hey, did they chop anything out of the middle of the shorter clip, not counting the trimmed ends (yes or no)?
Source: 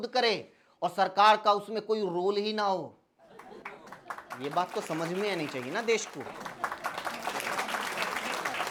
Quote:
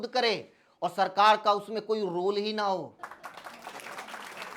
yes